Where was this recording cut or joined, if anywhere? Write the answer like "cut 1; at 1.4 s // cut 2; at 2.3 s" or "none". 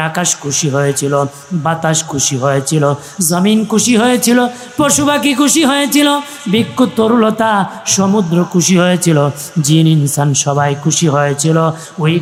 none